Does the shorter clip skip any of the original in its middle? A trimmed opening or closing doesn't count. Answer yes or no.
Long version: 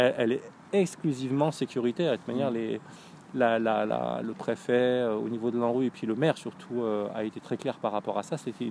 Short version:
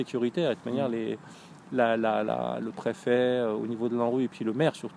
no